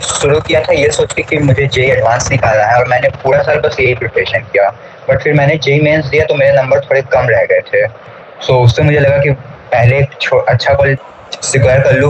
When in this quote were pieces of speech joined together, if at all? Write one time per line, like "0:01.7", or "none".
0:11.0